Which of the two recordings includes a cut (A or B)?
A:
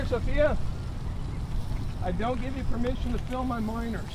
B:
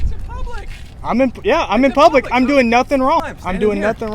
B